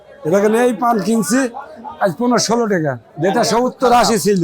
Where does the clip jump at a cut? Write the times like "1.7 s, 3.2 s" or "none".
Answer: 3.1 s